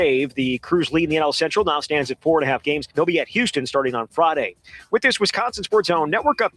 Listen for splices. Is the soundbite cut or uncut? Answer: cut